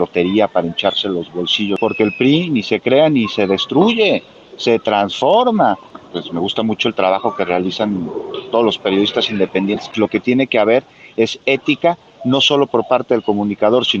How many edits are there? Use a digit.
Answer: 3